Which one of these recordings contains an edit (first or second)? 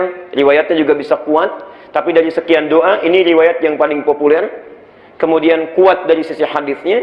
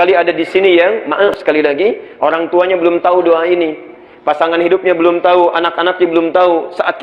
second